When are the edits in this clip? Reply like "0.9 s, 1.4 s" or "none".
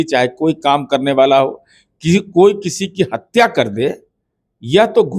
none